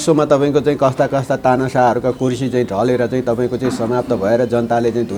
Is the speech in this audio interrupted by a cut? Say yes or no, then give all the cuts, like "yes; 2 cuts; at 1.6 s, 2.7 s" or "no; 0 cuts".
no; 0 cuts